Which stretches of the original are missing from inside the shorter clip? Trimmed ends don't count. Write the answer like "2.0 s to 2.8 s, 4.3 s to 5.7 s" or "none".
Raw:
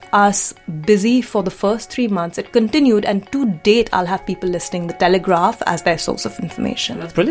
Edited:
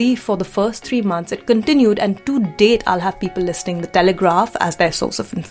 none